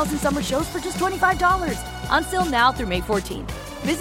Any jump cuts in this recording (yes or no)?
no